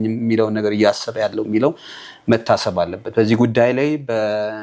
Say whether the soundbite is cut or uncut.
uncut